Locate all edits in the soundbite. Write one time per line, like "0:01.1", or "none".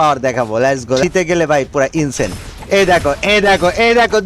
0:01.0